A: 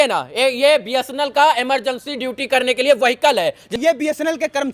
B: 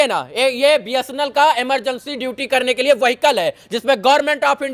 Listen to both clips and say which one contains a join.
A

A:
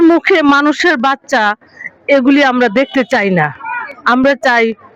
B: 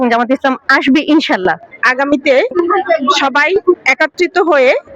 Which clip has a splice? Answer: B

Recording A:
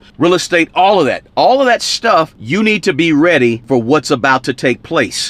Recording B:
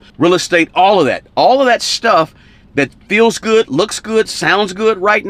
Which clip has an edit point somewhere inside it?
A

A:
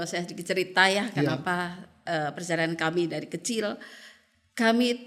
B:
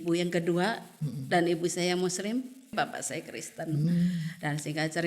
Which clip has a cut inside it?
B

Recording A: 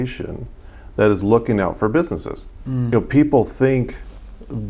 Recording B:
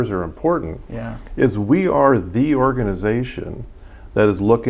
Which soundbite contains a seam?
A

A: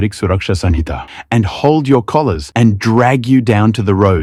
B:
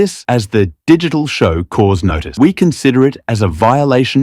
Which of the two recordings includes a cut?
B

